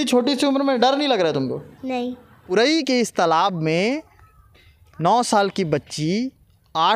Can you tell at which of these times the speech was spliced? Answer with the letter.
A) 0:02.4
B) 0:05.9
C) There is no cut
A